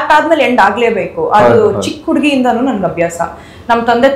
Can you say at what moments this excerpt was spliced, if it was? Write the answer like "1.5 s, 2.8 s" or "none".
none